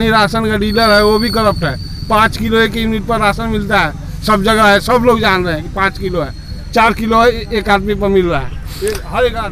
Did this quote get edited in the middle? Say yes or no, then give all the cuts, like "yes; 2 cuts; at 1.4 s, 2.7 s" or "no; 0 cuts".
no; 0 cuts